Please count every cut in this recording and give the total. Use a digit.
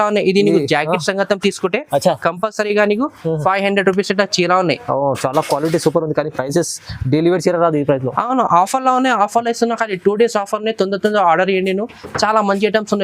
0